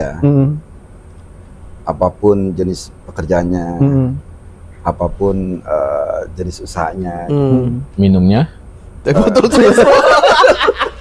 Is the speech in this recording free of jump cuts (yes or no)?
yes